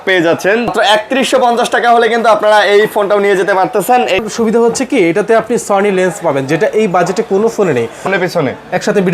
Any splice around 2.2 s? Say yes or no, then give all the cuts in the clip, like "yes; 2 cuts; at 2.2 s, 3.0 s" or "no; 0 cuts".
no; 3 cuts; at 0.7 s, 4.2 s, 8.1 s